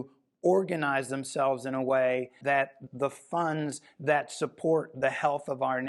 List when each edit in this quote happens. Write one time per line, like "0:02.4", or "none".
0:02.7